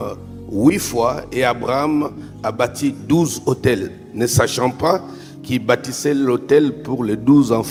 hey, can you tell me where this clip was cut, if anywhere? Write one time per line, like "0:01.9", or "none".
none